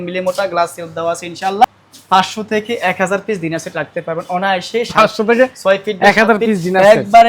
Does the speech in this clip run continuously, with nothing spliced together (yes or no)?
no